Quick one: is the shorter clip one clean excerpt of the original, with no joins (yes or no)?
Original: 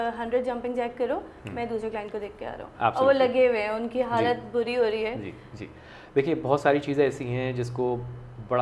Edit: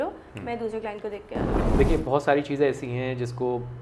no